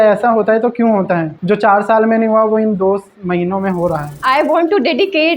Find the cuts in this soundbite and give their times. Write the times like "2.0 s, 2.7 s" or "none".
1.3 s, 4.1 s